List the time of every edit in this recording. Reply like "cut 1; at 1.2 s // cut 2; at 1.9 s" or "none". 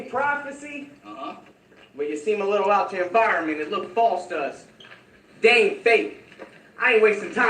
cut 1; at 5.8 s